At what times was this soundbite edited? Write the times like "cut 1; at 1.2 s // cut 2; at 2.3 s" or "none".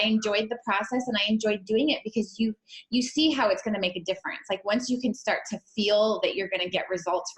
none